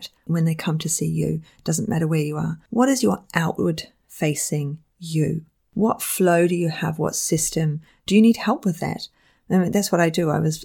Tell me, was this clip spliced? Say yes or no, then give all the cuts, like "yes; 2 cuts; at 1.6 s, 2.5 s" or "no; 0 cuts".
no; 0 cuts